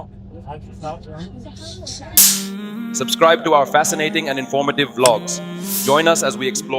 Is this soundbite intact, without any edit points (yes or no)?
no